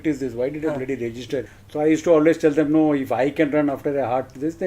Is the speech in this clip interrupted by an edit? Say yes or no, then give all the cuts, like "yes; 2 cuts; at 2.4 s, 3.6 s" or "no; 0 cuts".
yes; 1 cut; at 1.6 s